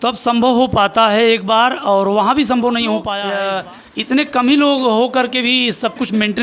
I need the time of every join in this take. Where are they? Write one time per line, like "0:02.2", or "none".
0:03.2